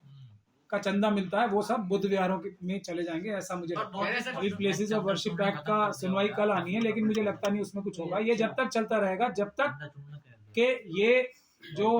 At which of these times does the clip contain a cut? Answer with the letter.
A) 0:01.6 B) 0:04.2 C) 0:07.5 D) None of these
B